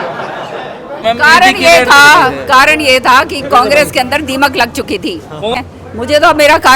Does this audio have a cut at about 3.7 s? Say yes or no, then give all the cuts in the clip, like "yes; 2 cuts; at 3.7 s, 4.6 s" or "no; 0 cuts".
no; 2 cuts; at 1.0 s, 5.5 s